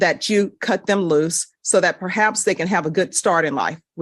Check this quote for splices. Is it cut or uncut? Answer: uncut